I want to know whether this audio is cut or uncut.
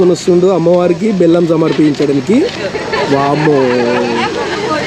uncut